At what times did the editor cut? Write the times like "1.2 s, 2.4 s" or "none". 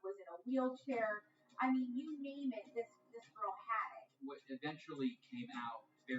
4.1 s